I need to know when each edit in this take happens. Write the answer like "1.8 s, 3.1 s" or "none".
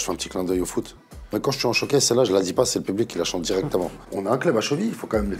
1.3 s, 4.0 s